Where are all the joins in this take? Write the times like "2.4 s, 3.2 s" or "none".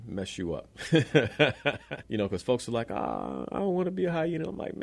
1.9 s

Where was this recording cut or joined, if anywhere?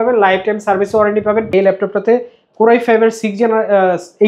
1.5 s

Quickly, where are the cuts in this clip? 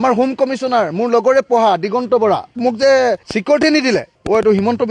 2.6 s

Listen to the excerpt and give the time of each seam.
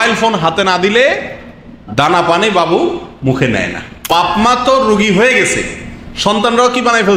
4.0 s

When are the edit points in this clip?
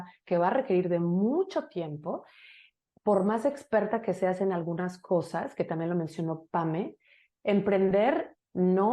none

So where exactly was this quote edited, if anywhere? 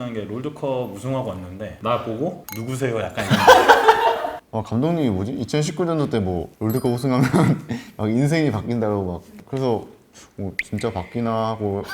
4.3 s

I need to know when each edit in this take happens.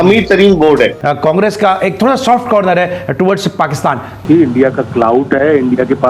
1.0 s, 4.2 s

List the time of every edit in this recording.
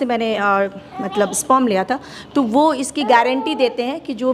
none

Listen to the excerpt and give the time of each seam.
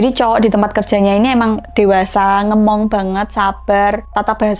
none

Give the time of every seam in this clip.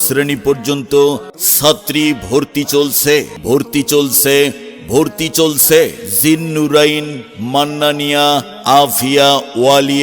1.4 s, 3.3 s

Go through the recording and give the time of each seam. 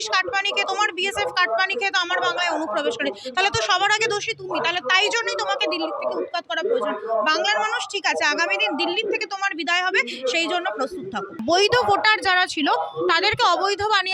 11.4 s

